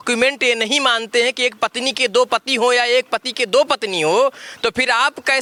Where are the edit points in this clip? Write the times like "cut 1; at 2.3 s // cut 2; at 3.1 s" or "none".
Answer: none